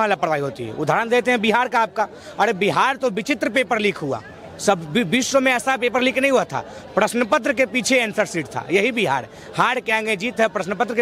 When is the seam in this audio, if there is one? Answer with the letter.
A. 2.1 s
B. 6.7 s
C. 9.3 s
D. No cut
D